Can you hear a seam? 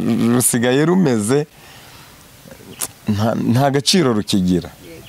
no; 0 cuts

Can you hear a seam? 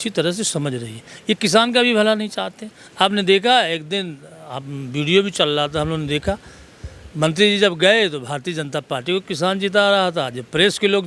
no; 0 cuts

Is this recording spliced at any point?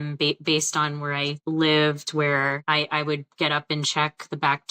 yes; 2 cuts; at 1.4 s, 2.6 s

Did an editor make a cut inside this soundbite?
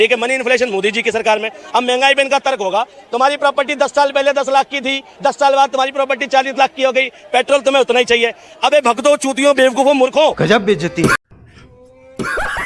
no; 0 cuts

